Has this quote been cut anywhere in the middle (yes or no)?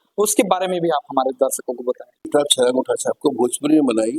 yes